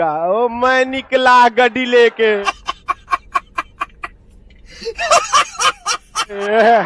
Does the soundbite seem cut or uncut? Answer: uncut